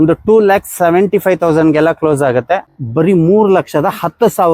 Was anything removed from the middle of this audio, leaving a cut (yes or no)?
yes